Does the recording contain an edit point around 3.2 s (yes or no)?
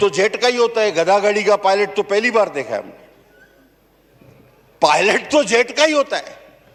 no